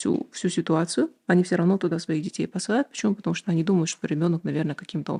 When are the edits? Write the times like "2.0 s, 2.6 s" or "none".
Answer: none

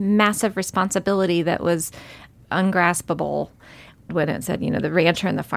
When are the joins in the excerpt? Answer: 2.3 s, 4.1 s

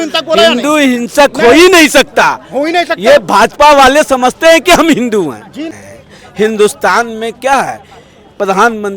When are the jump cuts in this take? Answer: 5.7 s

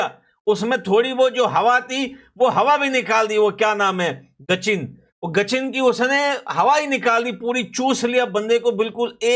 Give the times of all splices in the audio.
none

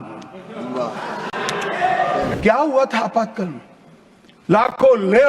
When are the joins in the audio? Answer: 2.4 s

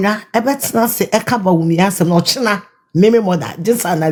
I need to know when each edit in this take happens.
none

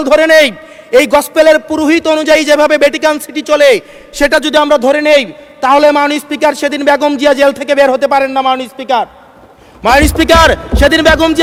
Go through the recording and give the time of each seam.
none

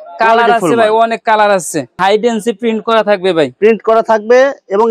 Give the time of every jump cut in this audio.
2.0 s

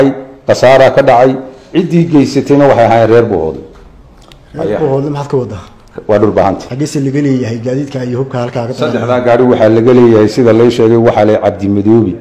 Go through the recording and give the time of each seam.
6.7 s

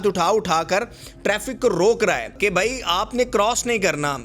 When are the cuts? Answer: 2.4 s

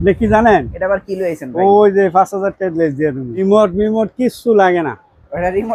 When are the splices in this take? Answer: 3.4 s

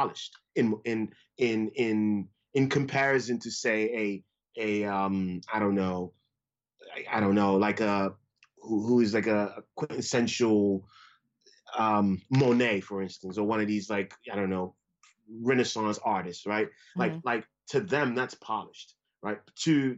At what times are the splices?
none

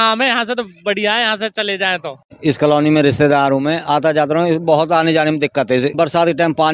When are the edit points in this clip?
2.3 s, 5.9 s

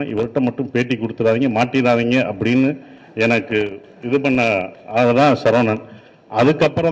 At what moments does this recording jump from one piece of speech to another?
none

